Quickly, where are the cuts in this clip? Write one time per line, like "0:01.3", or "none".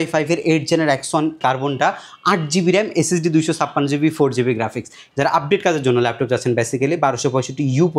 0:01.4
0:05.0